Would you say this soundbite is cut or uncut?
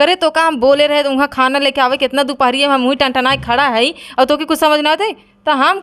uncut